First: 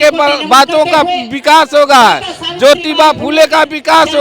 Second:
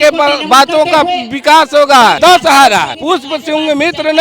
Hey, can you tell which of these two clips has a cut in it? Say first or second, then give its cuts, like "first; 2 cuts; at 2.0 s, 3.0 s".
second; 2 cuts; at 2.2 s, 2.9 s